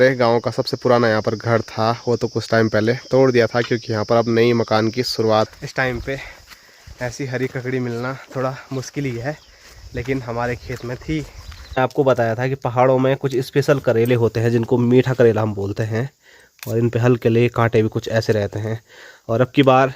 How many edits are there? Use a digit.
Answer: 2